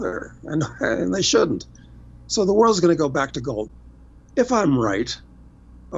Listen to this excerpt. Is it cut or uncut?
cut